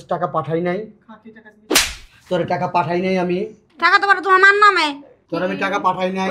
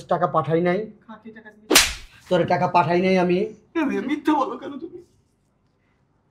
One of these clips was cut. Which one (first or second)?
first